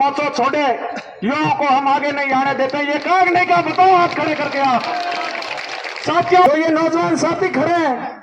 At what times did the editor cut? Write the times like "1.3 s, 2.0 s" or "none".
6.5 s